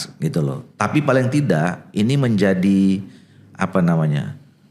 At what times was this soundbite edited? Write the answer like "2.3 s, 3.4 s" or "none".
none